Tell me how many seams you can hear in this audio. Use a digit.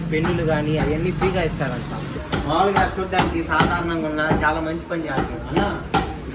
1